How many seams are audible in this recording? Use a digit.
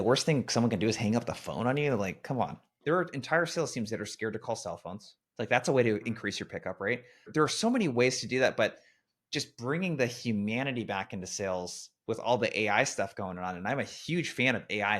2